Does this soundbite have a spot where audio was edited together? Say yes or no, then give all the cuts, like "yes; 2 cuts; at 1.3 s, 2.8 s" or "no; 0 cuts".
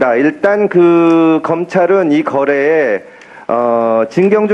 yes; 1 cut; at 2.3 s